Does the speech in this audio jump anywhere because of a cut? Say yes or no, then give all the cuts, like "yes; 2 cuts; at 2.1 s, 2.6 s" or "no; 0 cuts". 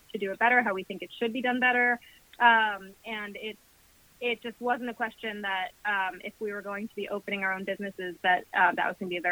no; 0 cuts